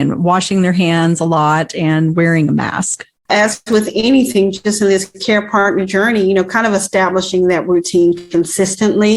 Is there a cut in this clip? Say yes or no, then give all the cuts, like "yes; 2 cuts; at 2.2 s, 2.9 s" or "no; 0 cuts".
yes; 1 cut; at 3.3 s